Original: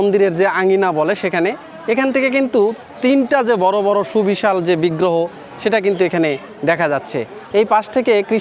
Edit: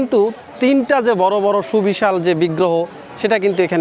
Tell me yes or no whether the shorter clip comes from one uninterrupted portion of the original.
yes